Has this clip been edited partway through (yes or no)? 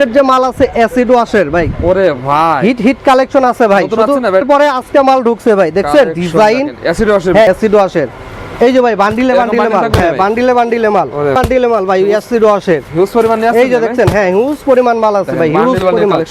yes